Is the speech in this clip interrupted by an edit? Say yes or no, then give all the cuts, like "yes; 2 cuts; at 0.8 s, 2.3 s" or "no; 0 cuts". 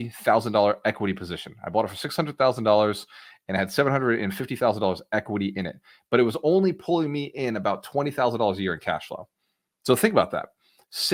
no; 0 cuts